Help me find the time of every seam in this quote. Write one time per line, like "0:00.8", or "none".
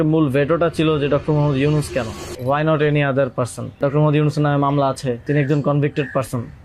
0:02.2
0:03.8
0:05.2